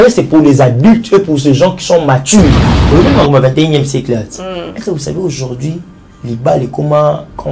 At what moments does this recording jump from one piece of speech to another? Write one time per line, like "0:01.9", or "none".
0:02.7